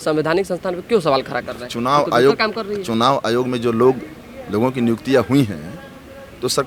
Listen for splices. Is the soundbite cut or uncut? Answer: uncut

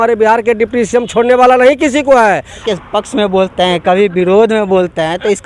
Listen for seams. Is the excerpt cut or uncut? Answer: cut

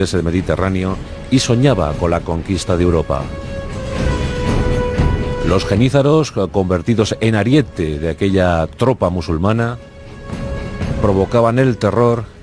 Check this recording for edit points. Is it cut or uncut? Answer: cut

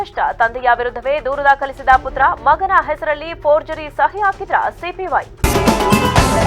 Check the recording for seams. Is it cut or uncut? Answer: cut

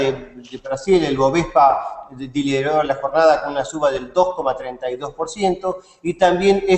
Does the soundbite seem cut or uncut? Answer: cut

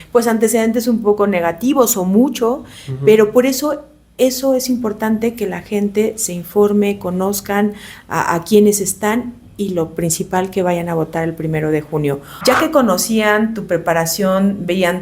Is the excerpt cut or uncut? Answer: cut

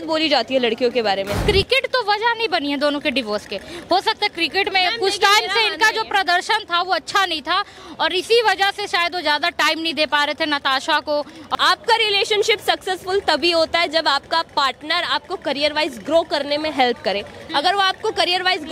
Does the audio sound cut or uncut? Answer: cut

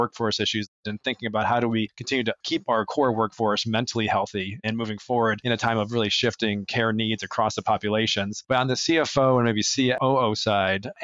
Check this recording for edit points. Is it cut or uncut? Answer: uncut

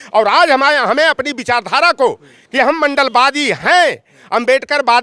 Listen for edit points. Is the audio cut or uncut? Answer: uncut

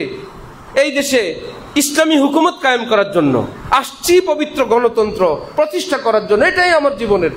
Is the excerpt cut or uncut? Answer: uncut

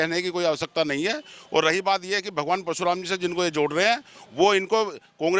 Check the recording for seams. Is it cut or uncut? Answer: uncut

